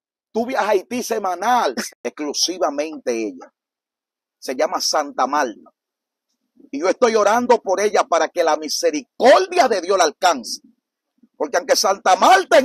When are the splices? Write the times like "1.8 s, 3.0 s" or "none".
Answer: 1.8 s